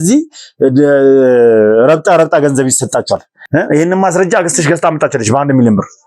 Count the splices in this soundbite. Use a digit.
1